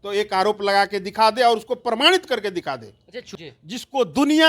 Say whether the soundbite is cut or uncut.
cut